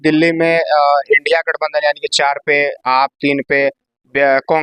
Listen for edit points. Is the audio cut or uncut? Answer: uncut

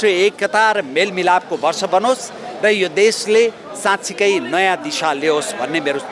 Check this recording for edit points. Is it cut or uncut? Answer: uncut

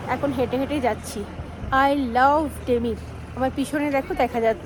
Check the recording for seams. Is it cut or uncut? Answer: uncut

